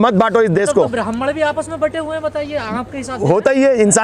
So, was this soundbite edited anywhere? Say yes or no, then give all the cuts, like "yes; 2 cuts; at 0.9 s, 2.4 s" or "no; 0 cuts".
no; 0 cuts